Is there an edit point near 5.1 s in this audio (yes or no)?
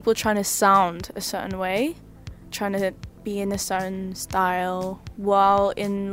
no